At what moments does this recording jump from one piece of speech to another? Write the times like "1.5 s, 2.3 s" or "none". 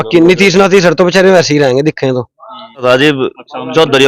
2.8 s